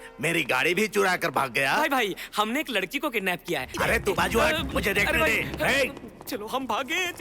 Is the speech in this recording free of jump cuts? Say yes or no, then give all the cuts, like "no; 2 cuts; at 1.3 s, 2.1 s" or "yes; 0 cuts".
no; 1 cut; at 3.7 s